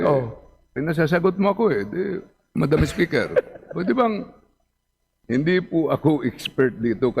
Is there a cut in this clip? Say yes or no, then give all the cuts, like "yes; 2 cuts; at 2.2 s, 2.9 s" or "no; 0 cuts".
yes; 1 cut; at 5.1 s